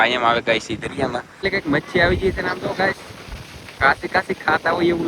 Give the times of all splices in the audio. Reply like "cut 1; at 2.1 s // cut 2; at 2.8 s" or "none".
cut 1; at 1.5 s